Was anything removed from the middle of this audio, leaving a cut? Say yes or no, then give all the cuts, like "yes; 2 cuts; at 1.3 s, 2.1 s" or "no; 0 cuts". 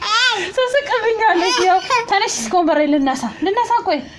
no; 0 cuts